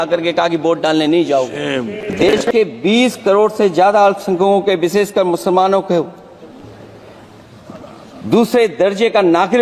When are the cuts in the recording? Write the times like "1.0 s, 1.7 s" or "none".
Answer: 2.4 s